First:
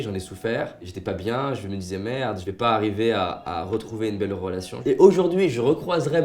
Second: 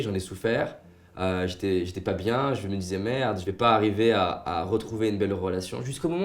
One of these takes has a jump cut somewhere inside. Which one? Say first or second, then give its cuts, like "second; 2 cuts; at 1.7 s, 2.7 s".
first; 2 cuts; at 0.9 s, 4.7 s